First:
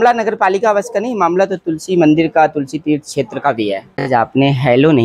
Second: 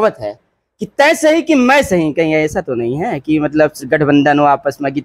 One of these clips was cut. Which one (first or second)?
first